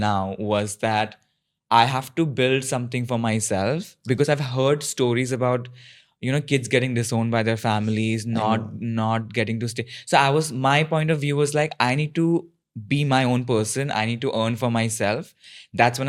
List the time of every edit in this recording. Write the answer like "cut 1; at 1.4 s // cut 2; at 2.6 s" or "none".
none

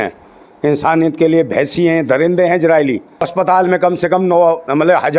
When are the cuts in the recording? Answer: cut 1; at 3.3 s

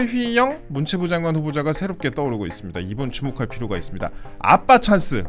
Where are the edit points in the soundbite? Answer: none

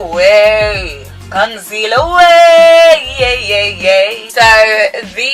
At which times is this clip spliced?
cut 1; at 4.2 s

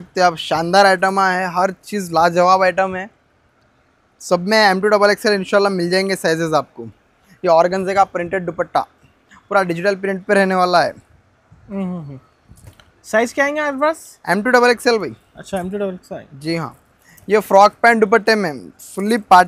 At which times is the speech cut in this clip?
none

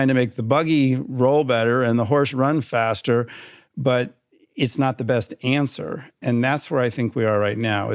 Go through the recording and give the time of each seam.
cut 1; at 6.2 s

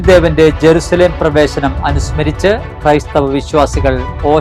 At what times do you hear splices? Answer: none

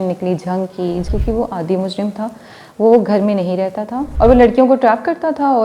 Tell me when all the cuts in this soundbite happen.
cut 1; at 1.1 s // cut 2; at 4.0 s

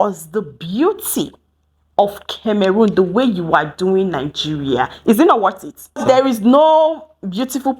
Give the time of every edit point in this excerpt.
cut 1; at 6.0 s

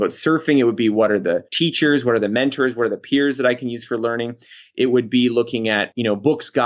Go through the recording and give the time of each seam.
none

